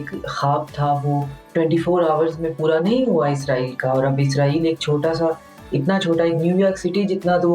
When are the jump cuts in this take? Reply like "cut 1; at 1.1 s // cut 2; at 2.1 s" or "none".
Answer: none